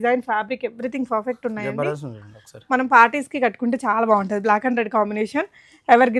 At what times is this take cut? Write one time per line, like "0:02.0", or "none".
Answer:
none